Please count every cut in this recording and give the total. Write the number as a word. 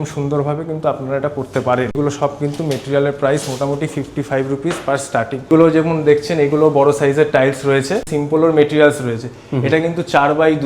three